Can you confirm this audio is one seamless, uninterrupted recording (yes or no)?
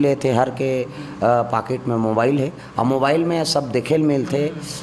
yes